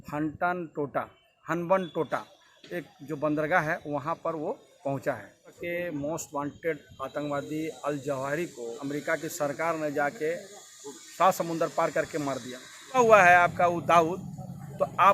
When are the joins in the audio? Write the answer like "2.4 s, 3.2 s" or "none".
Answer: 5.6 s, 8.8 s, 13.0 s